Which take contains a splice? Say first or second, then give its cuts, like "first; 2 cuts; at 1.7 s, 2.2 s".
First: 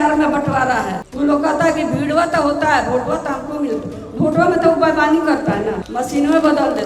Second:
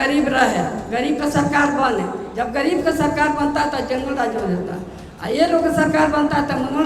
first; 2 cuts; at 1.0 s, 5.8 s